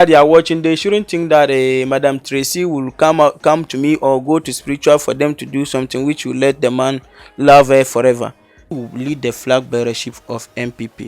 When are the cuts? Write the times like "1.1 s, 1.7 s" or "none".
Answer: 8.7 s